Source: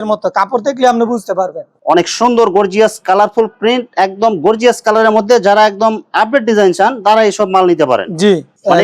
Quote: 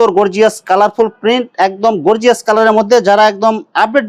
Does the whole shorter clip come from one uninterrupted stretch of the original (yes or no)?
yes